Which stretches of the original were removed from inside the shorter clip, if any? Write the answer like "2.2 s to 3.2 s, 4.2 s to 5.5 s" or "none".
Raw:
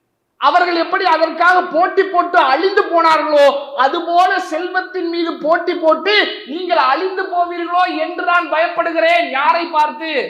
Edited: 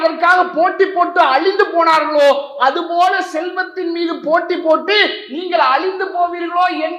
none